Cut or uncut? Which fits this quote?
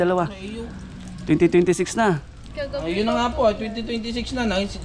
uncut